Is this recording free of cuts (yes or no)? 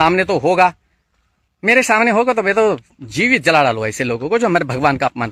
yes